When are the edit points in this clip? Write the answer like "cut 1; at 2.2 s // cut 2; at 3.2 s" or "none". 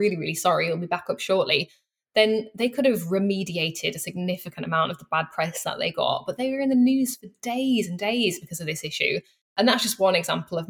cut 1; at 9.5 s